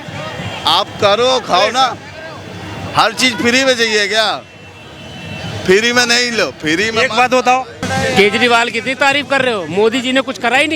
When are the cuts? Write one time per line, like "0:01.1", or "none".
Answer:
0:07.8

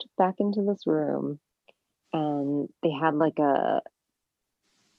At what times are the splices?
none

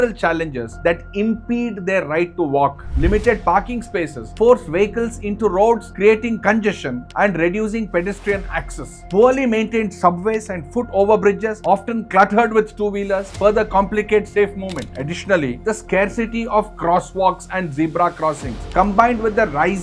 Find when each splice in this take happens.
none

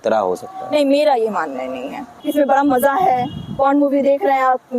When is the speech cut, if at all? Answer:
0:02.2

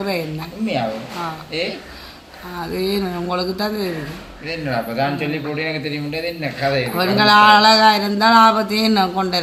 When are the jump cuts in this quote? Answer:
none

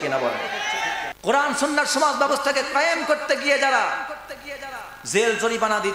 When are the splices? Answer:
0:01.1

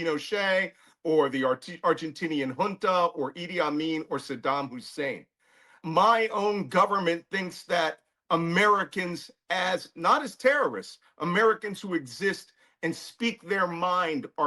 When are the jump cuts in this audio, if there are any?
0:05.8

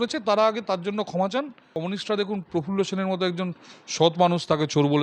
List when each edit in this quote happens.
0:01.7

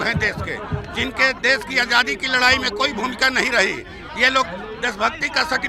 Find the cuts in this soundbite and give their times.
none

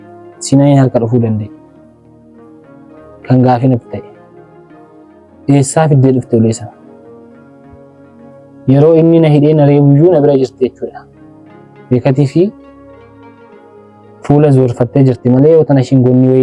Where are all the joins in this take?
0:06.8
0:08.6
0:12.5
0:14.2

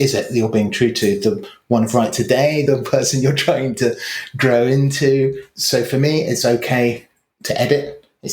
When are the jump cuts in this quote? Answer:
0:02.6
0:05.5

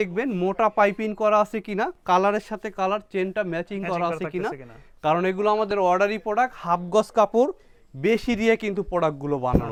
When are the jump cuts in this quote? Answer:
none

